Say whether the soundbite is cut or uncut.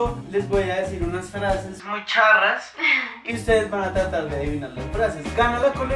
uncut